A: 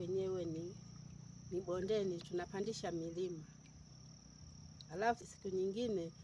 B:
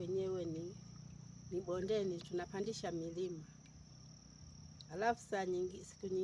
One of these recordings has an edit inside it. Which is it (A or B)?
A